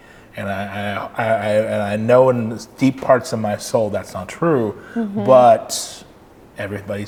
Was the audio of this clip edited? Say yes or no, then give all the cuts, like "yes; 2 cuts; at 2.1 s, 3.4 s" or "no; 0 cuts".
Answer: no; 0 cuts